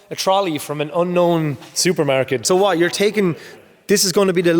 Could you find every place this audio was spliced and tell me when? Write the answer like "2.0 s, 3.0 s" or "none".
2.4 s